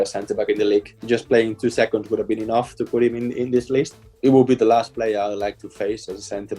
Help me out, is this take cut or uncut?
cut